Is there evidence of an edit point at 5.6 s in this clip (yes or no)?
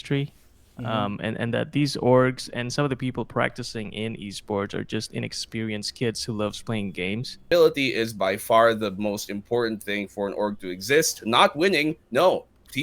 no